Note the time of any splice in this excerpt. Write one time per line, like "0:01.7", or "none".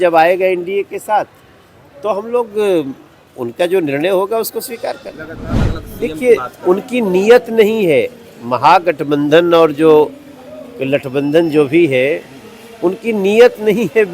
0:05.6

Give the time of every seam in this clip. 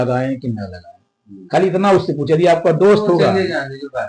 none

